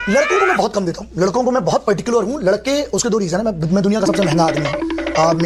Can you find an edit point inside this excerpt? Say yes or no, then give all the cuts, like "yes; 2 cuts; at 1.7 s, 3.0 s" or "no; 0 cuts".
no; 0 cuts